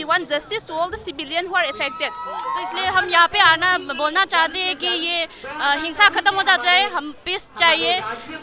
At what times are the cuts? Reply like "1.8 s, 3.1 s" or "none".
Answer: 2.5 s